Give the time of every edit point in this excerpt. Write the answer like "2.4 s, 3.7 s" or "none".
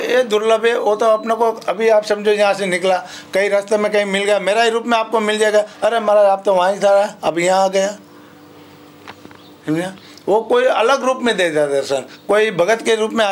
none

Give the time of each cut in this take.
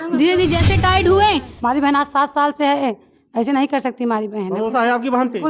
1.5 s

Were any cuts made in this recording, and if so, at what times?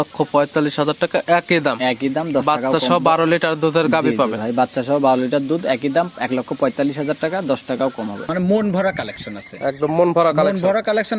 8.3 s

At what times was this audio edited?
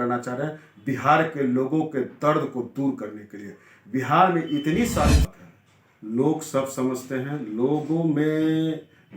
5.2 s

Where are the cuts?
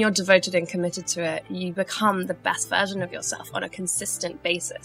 none

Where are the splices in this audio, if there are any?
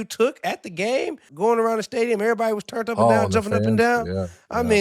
1.3 s

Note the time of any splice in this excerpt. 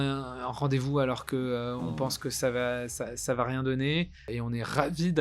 4.3 s

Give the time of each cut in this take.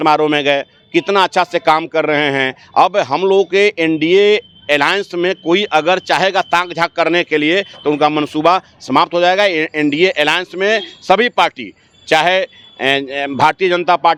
none

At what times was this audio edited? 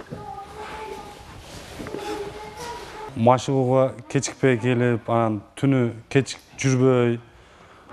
3.0 s

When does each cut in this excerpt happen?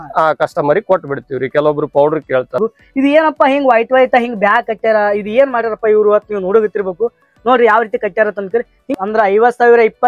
2.6 s, 8.9 s

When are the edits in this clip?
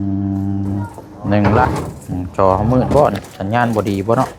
1.7 s

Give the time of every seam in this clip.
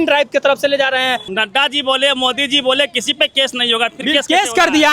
1.3 s

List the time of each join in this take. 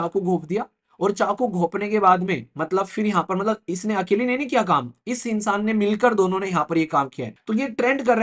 7.3 s

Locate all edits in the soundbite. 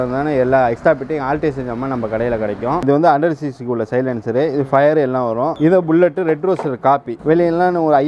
2.8 s, 5.5 s, 7.1 s

